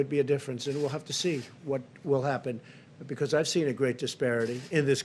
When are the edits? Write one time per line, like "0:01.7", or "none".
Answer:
none